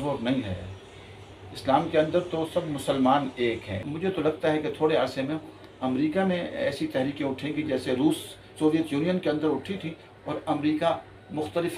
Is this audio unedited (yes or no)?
no